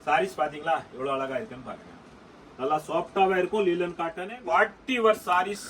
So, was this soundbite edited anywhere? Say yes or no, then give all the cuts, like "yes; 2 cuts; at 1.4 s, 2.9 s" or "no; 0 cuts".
yes; 1 cut; at 4.3 s